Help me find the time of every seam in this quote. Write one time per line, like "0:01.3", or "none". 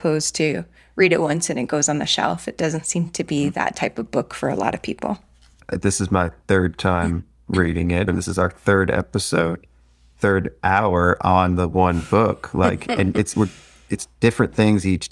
0:08.1